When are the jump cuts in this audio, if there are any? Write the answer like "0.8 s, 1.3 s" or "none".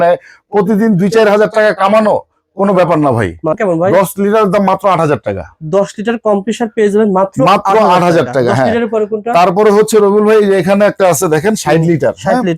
3.5 s

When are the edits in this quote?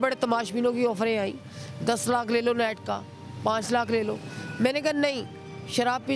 none

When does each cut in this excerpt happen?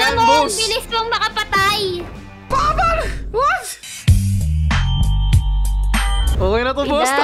6.3 s

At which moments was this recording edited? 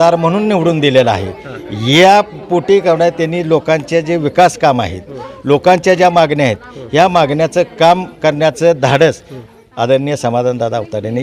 none

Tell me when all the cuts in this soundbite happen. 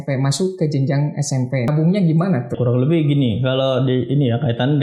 1.7 s, 2.6 s

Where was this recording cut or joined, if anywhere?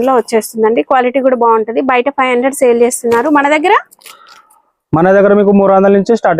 none

